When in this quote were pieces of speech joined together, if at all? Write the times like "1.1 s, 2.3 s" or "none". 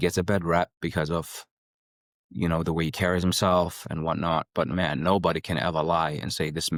none